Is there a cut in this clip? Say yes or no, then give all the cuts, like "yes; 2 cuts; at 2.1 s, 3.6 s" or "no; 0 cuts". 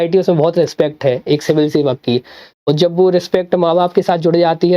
no; 0 cuts